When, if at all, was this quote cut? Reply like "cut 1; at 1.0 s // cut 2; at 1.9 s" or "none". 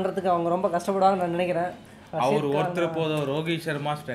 cut 1; at 1.9 s